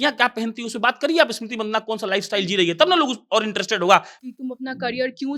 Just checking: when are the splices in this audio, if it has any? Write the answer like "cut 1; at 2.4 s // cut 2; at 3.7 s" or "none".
cut 1; at 4.1 s